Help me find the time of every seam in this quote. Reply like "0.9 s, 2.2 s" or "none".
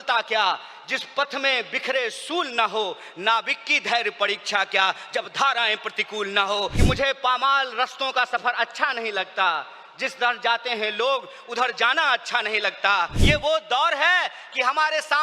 6.8 s, 13.2 s